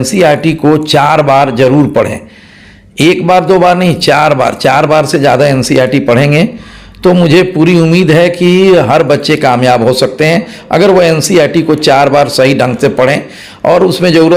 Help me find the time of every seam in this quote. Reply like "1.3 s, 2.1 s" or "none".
none

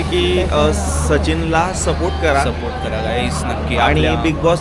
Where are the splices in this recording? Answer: none

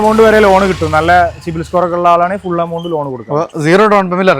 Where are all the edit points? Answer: none

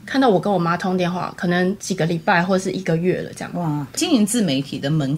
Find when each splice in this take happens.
1.8 s, 4.0 s

